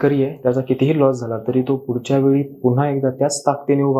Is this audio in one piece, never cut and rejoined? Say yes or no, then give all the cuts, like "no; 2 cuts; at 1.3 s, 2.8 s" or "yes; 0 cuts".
yes; 0 cuts